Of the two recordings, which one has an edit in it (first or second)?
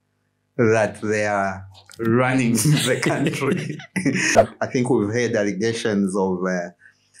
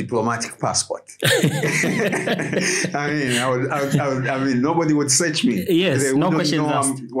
first